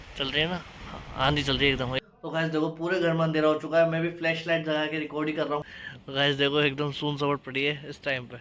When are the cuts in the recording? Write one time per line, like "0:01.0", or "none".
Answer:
0:02.0
0:05.7